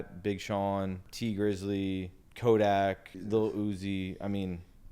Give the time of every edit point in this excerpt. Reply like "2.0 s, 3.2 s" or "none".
1.1 s, 2.2 s, 3.1 s